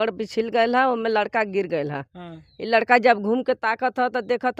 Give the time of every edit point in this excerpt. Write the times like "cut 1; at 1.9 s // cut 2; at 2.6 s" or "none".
none